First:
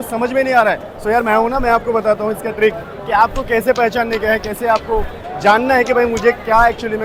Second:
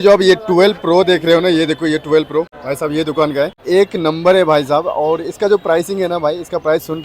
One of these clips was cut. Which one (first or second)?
second